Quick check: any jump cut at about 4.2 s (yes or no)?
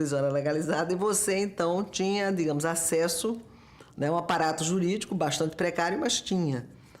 no